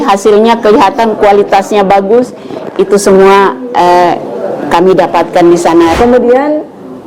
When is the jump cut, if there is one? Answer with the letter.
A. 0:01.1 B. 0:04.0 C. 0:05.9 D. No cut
C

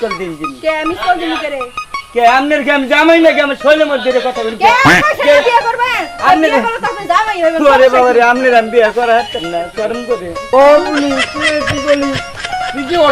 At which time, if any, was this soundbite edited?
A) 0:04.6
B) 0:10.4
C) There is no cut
B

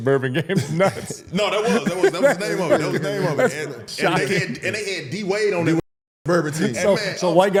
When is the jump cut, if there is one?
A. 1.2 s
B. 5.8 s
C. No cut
C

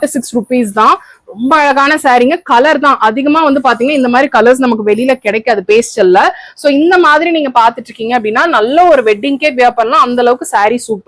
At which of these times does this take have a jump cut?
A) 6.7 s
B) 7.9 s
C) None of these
C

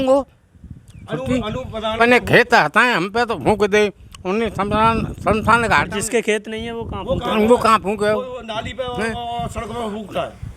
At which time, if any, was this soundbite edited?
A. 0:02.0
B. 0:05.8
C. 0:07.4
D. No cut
A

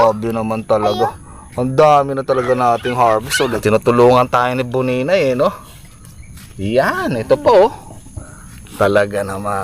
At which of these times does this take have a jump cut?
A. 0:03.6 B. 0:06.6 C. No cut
A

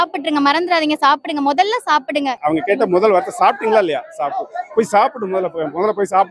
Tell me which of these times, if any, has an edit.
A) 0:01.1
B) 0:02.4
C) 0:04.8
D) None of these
B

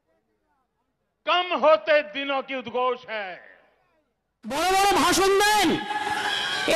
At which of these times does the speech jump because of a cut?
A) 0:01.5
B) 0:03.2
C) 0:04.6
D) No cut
C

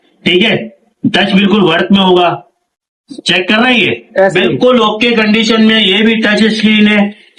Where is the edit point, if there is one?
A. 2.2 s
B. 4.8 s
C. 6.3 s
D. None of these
D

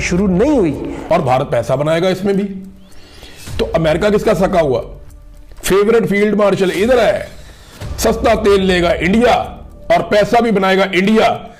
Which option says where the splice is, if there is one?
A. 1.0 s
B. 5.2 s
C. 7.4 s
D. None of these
A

